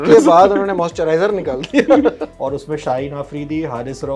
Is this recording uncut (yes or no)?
no